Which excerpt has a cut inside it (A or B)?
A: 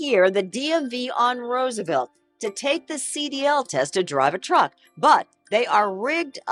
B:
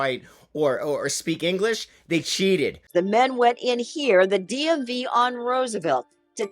B